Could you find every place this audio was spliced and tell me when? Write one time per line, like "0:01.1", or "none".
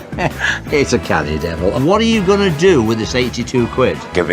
0:01.7